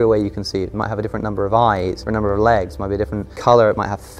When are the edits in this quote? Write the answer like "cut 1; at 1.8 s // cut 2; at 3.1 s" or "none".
cut 1; at 2.0 s // cut 2; at 3.2 s